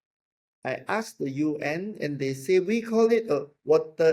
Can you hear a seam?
no; 0 cuts

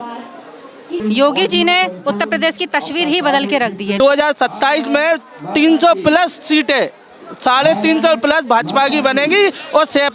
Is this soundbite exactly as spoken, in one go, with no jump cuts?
no; 2 cuts; at 1.0 s, 4.0 s

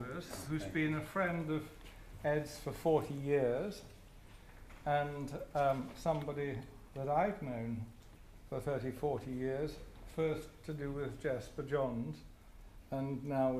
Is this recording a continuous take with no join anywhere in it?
no; 1 cut; at 7.7 s

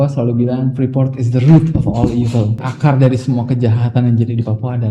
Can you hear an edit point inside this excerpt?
yes; 1 cut; at 2.6 s

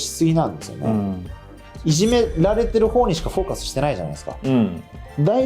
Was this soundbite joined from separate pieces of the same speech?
yes; 1 cut; at 1.7 s

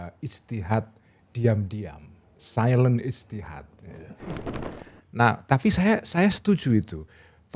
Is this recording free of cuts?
no; 1 cut; at 4.5 s

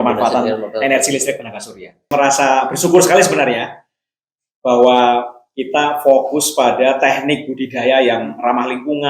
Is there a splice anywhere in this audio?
yes; 1 cut; at 2.1 s

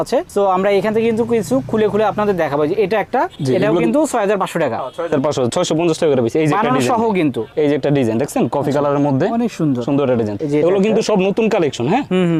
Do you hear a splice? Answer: no; 0 cuts

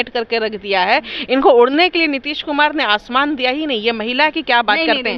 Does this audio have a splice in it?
no; 0 cuts

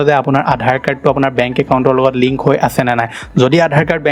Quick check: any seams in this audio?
no; 0 cuts

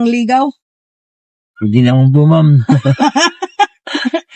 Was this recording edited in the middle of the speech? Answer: no; 0 cuts

